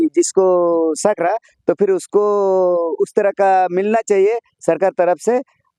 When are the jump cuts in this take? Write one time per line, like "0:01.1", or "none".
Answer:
none